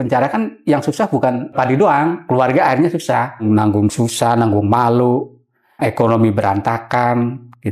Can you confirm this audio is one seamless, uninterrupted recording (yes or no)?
no